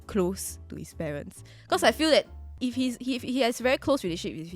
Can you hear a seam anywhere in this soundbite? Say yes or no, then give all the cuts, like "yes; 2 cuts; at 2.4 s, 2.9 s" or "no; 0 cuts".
yes; 1 cut; at 2.4 s